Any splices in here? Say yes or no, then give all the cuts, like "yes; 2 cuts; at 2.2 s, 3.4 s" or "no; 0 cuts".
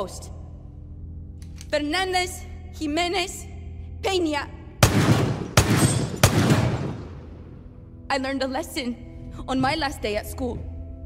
no; 0 cuts